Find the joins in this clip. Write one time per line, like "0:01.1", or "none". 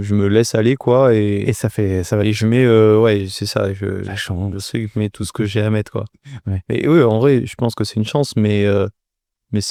none

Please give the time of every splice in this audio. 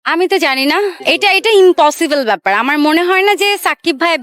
0:01.0

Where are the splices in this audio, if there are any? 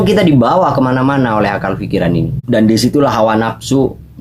0:02.4

